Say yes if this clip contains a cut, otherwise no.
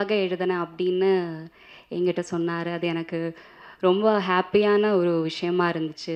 no